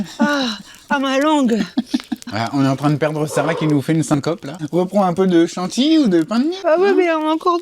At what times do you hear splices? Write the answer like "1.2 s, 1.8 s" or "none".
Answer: 2.2 s, 4.5 s, 6.6 s